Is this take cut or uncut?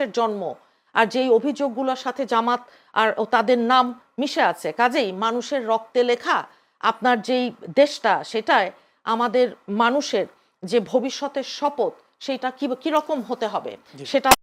uncut